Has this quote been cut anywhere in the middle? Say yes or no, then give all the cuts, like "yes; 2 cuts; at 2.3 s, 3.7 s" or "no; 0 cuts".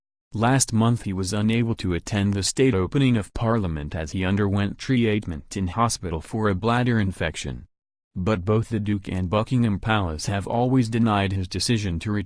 no; 0 cuts